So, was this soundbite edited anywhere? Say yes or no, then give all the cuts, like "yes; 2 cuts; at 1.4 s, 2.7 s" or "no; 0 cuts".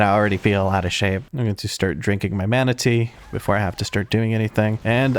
yes; 1 cut; at 1.3 s